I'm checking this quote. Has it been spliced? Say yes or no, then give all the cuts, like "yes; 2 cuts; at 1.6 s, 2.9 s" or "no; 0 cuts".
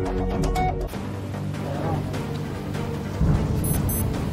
yes; 1 cut; at 0.9 s